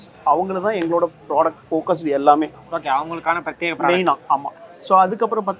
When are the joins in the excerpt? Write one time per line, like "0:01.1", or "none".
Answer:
none